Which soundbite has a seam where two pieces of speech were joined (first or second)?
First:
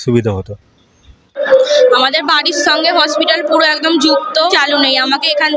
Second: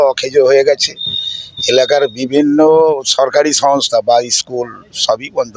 first